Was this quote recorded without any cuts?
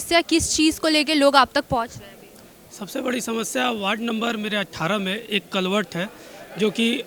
yes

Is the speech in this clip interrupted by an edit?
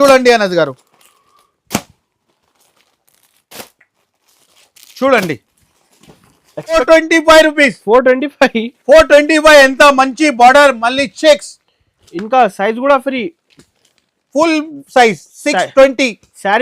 yes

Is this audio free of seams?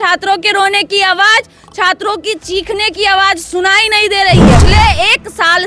no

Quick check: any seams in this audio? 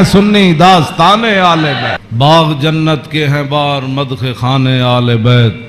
yes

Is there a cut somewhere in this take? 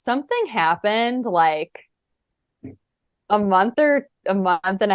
no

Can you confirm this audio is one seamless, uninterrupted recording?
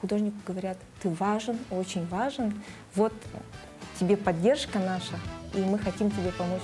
yes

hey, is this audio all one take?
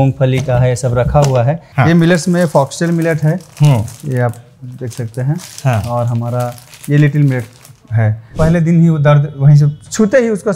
no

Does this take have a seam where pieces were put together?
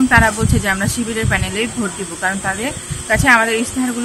no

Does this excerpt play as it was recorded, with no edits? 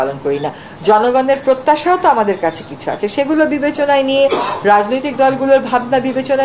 yes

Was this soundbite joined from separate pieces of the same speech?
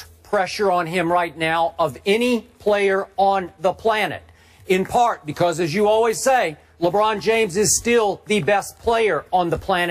no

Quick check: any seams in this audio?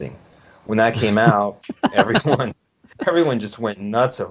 no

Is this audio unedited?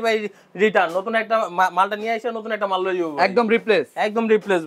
yes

